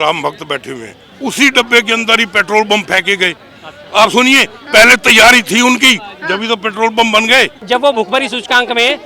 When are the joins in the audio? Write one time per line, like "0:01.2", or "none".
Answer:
0:01.1
0:07.6